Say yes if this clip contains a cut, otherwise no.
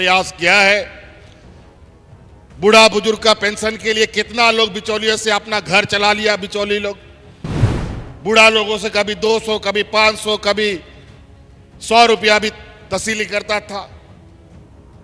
yes